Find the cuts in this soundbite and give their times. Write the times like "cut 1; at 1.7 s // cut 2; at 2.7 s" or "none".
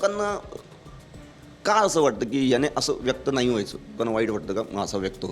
cut 1; at 4.0 s